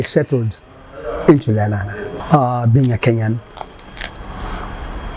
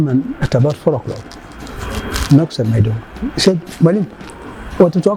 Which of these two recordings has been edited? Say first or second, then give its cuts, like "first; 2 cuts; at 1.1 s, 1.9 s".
first; 1 cut; at 2.1 s